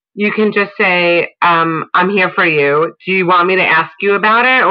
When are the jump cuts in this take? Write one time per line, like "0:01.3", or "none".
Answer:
none